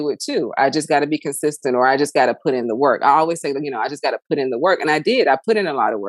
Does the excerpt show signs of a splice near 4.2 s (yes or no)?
no